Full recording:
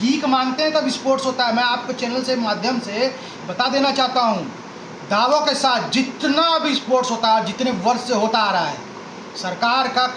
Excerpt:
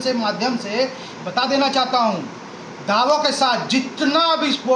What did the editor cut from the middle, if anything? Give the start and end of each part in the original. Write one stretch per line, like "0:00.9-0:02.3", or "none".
none